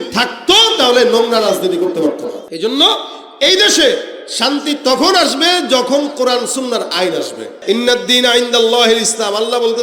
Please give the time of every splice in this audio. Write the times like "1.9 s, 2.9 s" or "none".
2.4 s, 7.5 s

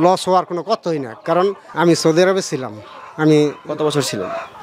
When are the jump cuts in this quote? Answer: 1.7 s

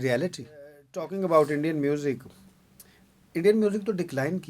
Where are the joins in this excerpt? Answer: 1.0 s

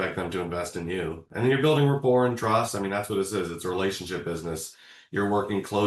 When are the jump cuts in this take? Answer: 1.2 s

